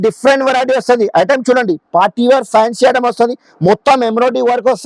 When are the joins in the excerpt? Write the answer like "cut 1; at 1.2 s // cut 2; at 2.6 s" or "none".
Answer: none